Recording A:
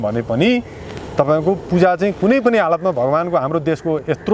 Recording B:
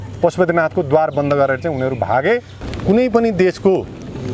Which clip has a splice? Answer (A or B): B